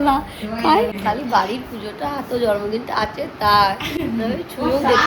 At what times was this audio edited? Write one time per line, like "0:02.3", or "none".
0:00.9